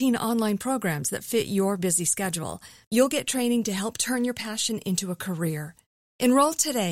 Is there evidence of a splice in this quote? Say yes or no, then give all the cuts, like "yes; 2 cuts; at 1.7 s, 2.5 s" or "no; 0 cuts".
no; 0 cuts